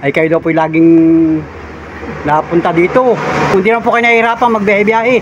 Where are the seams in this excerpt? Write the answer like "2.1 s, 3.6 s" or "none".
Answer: 3.5 s